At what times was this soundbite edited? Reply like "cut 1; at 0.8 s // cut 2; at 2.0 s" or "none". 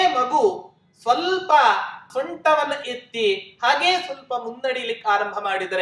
cut 1; at 2.1 s